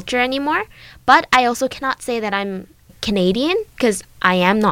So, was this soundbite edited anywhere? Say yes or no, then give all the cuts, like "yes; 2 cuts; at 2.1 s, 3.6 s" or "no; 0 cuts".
yes; 1 cut; at 3.0 s